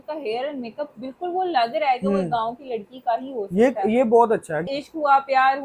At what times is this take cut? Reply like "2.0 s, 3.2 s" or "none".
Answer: 4.7 s